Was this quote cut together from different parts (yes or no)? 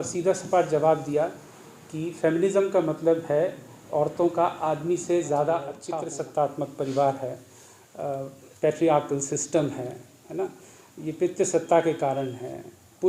yes